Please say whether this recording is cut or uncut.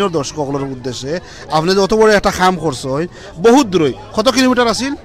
uncut